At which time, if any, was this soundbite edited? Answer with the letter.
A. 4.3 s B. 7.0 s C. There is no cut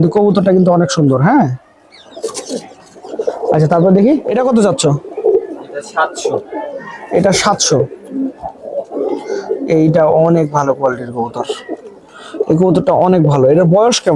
A